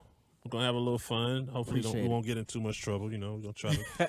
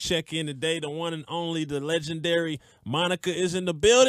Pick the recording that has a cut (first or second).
first